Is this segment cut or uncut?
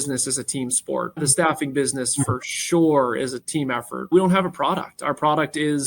cut